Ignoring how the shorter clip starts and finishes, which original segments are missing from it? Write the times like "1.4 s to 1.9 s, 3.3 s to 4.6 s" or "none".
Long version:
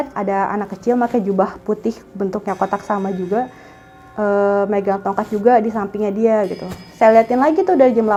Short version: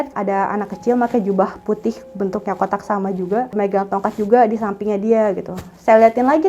3.5 s to 4.7 s